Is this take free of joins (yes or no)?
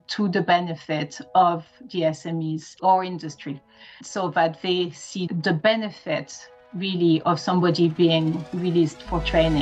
yes